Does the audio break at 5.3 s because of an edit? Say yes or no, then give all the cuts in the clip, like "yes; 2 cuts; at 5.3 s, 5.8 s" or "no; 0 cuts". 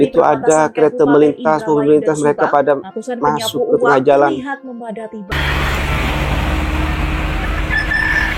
yes; 1 cut; at 5.3 s